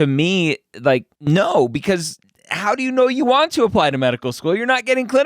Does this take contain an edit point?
yes; 1 cut; at 1.1 s

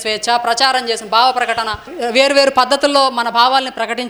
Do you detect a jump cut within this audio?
yes; 1 cut; at 1.9 s

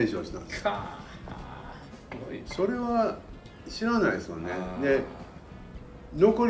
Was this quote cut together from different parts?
no; 0 cuts

